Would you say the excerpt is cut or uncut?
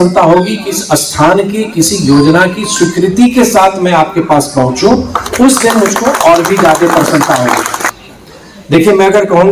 cut